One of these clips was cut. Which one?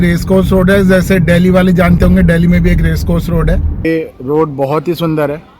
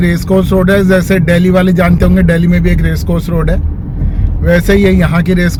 first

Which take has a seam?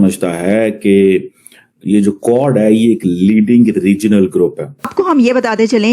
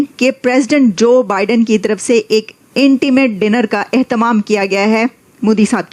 first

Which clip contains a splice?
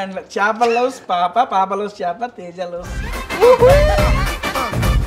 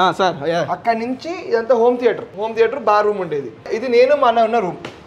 second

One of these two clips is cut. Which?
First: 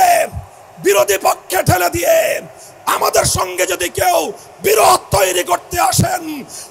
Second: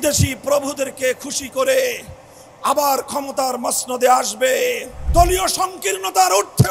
second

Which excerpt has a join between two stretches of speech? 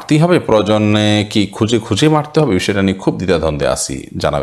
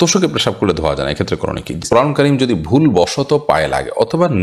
second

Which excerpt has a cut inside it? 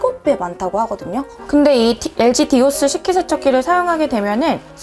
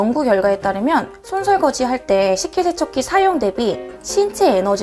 first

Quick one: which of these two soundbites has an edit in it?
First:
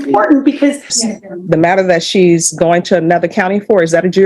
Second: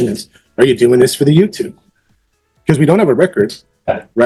first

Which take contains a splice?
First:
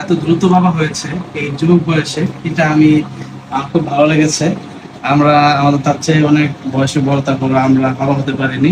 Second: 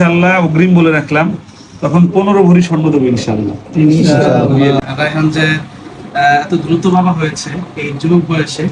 second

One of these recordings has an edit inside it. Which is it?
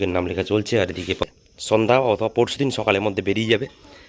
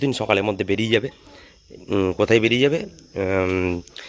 first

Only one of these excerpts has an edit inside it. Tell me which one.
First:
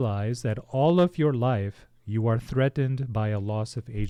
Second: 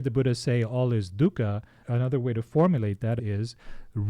second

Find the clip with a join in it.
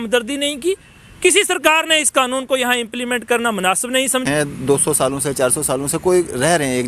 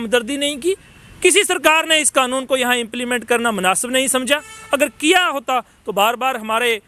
first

